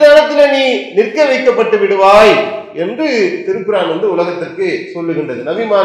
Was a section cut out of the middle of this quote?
no; 0 cuts

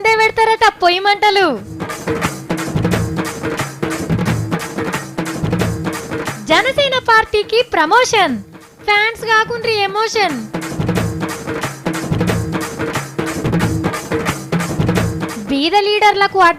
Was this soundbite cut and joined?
no; 0 cuts

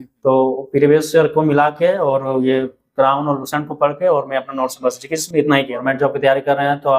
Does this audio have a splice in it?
yes; 1 cut; at 5.8 s

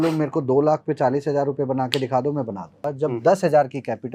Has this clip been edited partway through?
yes; 1 cut; at 2.8 s

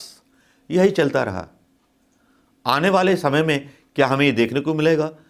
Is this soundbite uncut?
yes; 0 cuts

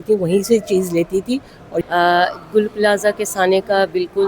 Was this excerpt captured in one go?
no; 1 cut; at 1.9 s

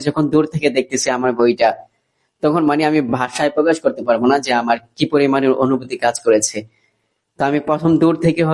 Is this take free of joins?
yes; 0 cuts

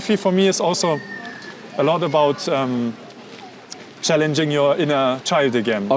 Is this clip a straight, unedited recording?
yes; 0 cuts

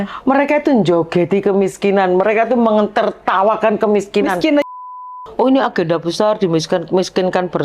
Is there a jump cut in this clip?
yes; 1 cut; at 4.7 s

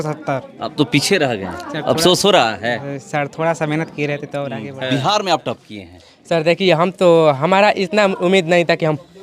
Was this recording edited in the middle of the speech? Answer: yes; 1 cut; at 4.6 s

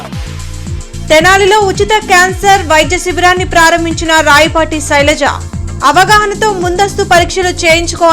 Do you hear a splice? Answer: no; 0 cuts

